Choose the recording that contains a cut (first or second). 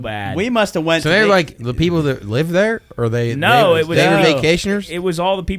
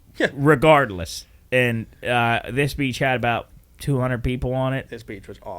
second